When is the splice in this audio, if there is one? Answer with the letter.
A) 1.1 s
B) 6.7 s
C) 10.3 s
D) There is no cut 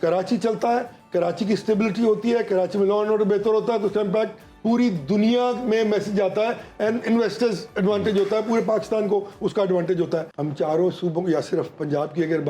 C